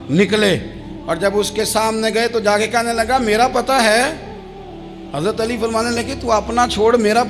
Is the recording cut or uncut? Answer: uncut